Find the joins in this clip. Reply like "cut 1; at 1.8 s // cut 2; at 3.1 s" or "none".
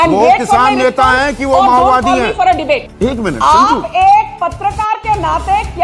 cut 1; at 2.9 s